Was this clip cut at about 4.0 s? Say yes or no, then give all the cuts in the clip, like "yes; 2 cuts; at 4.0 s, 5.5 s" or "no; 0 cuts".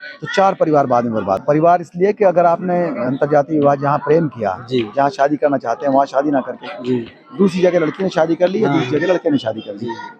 no; 1 cut; at 1.4 s